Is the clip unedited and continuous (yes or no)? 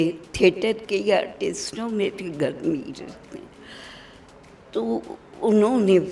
yes